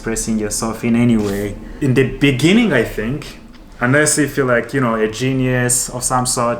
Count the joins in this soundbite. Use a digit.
1